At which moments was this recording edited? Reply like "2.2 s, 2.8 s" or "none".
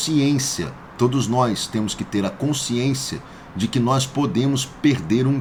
none